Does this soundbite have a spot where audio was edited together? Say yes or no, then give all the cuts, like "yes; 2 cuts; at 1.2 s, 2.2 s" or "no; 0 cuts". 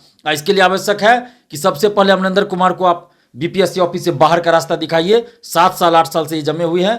no; 0 cuts